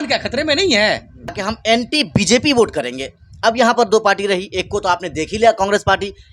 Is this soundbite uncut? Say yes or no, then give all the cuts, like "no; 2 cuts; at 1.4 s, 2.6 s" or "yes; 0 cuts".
no; 1 cut; at 1.4 s